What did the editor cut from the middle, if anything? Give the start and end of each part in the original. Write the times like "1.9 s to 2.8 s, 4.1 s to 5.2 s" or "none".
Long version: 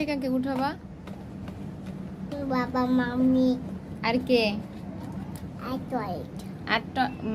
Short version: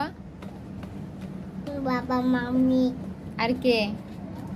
none